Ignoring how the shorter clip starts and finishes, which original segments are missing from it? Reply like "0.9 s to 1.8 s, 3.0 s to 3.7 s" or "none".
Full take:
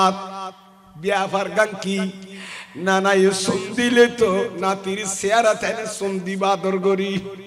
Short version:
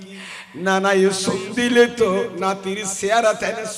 none